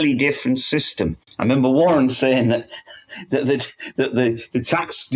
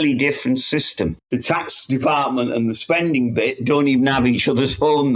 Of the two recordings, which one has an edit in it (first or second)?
second